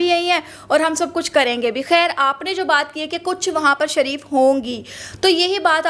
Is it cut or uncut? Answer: uncut